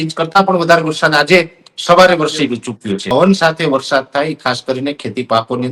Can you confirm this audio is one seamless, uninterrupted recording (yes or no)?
no